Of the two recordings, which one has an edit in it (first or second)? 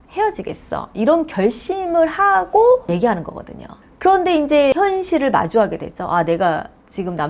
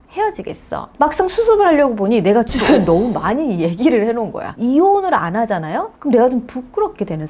second